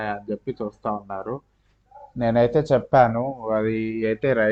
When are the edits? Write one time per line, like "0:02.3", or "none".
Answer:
none